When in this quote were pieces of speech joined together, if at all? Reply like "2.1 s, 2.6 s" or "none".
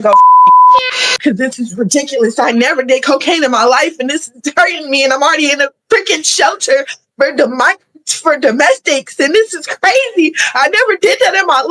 0.9 s

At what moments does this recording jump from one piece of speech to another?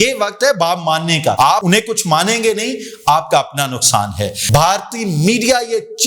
1.5 s, 4.3 s

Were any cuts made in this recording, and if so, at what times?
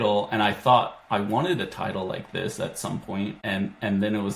3.4 s

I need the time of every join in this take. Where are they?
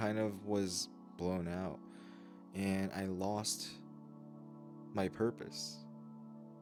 none

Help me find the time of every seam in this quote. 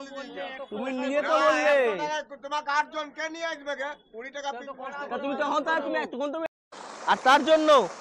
6.5 s

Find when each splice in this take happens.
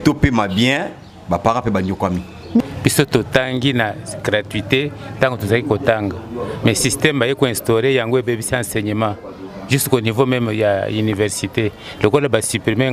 2.6 s

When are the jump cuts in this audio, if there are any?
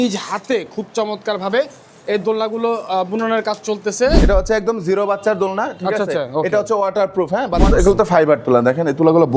4.2 s, 7.7 s

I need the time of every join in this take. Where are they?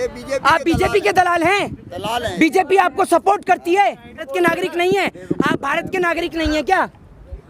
4.3 s

